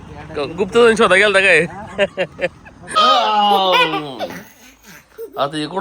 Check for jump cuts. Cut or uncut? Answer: cut